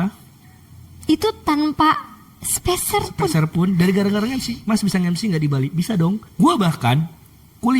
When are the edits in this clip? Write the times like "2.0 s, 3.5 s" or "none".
6.3 s